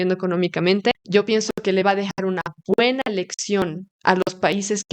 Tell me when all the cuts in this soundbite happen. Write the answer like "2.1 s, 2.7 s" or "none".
1.0 s